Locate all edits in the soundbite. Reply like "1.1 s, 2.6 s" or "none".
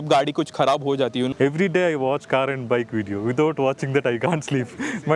1.3 s